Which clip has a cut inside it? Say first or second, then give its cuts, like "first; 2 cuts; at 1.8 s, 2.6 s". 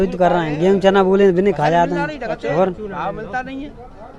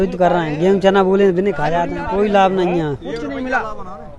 second; 1 cut; at 2.0 s